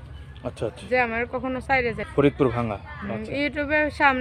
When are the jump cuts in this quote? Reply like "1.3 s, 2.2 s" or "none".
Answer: 2.0 s